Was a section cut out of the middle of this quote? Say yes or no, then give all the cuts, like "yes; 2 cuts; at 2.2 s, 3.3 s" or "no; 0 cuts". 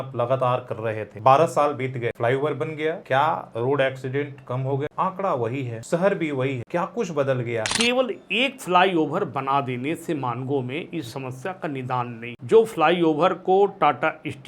yes; 8 cuts; at 1.1 s, 2.2 s, 3.0 s, 4.9 s, 5.7 s, 6.6 s, 7.7 s, 12.3 s